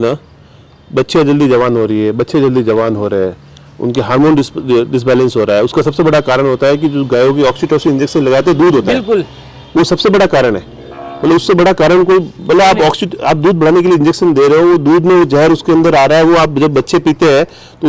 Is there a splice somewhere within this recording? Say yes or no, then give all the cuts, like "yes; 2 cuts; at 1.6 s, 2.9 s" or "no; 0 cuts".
no; 0 cuts